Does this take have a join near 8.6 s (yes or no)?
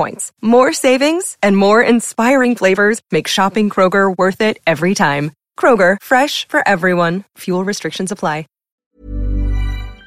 yes